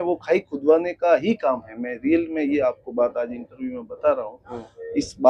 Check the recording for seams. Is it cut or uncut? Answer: uncut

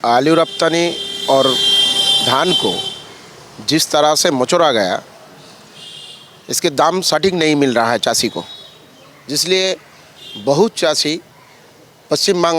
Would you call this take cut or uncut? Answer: uncut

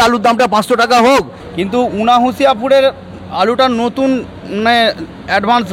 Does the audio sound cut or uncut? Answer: cut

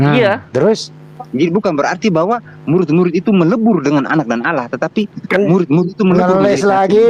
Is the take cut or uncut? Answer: uncut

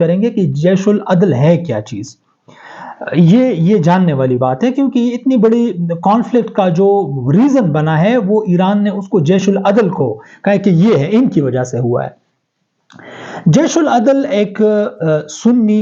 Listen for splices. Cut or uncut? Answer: uncut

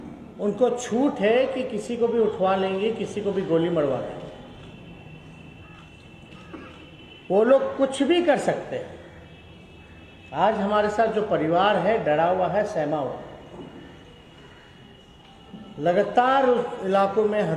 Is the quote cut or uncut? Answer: uncut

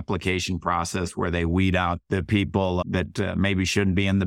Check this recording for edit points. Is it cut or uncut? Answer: cut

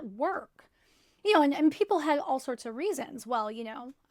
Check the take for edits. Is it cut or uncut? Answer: uncut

